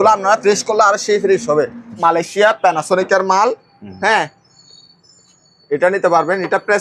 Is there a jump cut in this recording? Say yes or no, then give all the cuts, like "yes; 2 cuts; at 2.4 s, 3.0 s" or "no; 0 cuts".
yes; 1 cut; at 1.9 s